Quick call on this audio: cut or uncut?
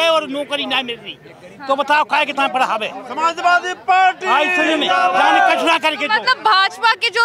uncut